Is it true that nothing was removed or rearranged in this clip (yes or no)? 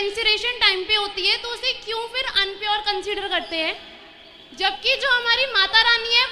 yes